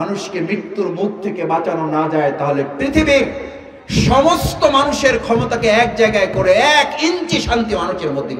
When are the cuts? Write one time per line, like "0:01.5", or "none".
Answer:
none